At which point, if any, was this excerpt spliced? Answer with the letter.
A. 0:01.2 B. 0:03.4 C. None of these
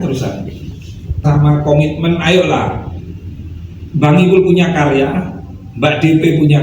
A